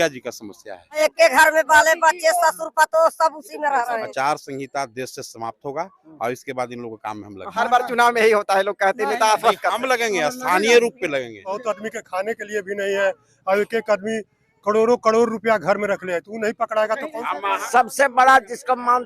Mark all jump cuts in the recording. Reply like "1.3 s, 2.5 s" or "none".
1.0 s, 4.1 s, 11.6 s, 17.6 s